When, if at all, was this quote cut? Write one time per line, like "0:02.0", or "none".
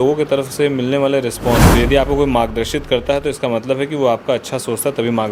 0:01.7